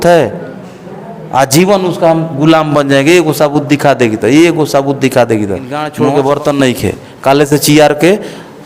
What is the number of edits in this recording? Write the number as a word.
one